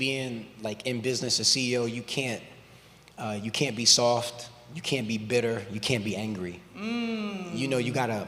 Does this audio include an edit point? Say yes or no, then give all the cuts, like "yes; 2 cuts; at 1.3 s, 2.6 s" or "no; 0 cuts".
no; 0 cuts